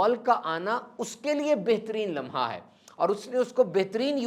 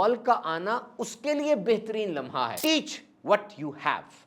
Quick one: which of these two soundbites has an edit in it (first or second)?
second